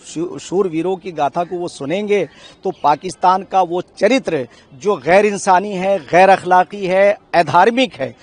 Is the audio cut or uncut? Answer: uncut